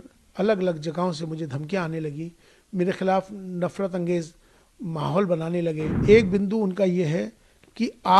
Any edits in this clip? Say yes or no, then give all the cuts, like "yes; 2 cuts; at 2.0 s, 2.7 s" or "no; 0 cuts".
yes; 1 cut; at 5.9 s